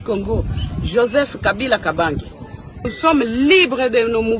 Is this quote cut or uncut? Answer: cut